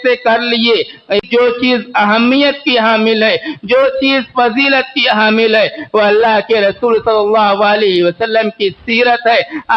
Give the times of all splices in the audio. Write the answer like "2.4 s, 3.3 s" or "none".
1.2 s